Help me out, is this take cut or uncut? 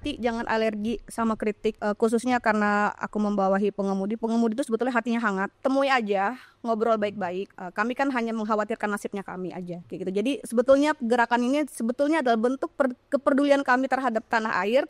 cut